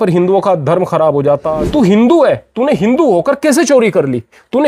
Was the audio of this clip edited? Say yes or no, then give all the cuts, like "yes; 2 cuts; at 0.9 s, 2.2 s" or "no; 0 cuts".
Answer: yes; 1 cut; at 1.5 s